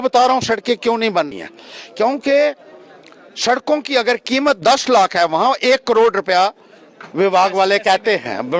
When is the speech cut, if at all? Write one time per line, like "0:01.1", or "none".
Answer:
0:01.3